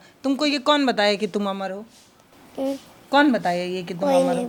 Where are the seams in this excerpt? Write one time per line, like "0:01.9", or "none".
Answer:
none